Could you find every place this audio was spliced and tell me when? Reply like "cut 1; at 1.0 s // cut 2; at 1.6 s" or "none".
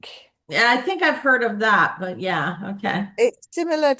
none

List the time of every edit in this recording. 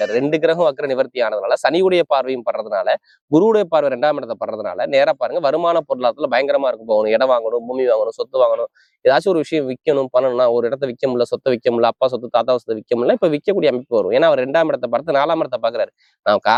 none

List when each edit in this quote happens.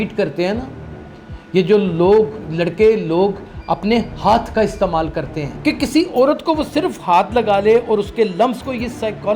cut 1; at 5.4 s

